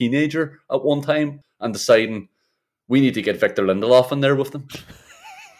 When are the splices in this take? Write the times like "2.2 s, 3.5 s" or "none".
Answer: 1.4 s